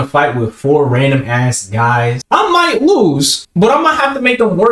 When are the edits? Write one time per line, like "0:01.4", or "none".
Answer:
0:02.2
0:03.4